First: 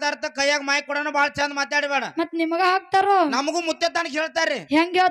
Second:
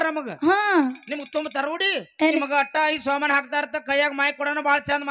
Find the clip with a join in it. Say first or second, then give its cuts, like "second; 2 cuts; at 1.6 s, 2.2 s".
second; 1 cut; at 2.4 s